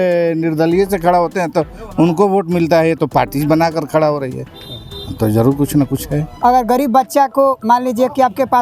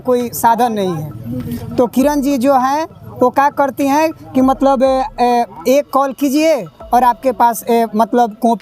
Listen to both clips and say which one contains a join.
first; 1 cut; at 6.3 s

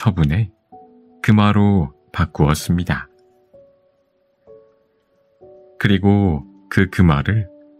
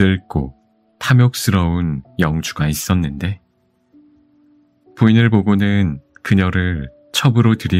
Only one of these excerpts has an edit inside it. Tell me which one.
second; 2 cuts; at 3.5 s, 5.0 s

